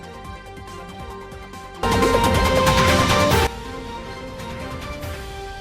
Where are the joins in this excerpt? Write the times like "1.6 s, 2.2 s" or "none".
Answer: 1.3 s